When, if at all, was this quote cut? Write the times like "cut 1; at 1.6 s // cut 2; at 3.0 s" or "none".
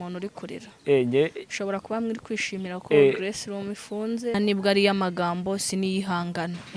cut 1; at 4.3 s